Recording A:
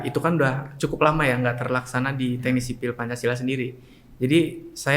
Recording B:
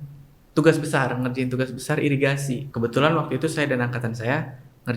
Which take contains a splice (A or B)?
B